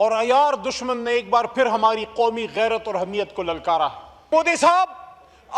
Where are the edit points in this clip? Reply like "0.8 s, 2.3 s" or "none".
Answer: 4.3 s